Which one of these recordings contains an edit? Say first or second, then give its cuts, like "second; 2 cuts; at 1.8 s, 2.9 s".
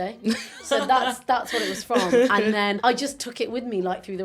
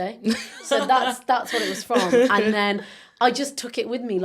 first; 1 cut; at 2.8 s